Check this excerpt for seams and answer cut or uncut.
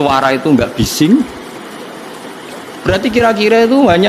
uncut